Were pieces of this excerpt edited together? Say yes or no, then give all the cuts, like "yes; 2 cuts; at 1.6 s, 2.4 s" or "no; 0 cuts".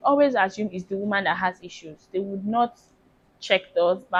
no; 0 cuts